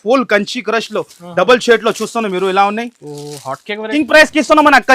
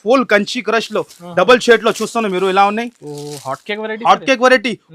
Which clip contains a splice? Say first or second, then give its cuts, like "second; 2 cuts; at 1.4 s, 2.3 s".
first; 1 cut; at 3.9 s